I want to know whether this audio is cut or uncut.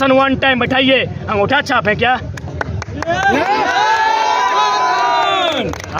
uncut